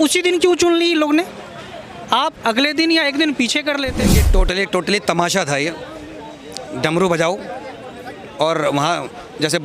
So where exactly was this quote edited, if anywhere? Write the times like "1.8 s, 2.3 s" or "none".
4.3 s

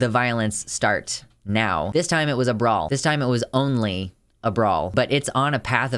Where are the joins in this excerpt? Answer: 1.9 s, 2.9 s, 4.9 s

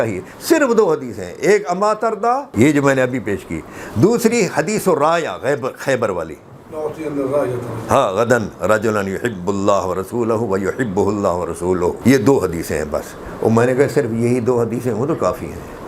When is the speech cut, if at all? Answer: 2.5 s, 12.0 s

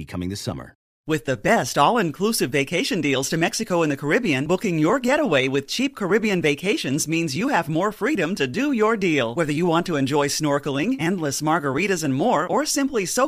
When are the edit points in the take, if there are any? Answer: 0.9 s

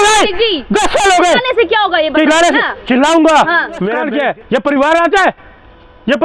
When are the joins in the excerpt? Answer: 3.9 s

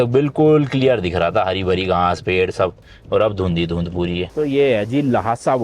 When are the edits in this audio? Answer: 4.3 s

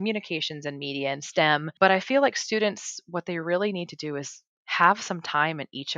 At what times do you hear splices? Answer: 1.7 s

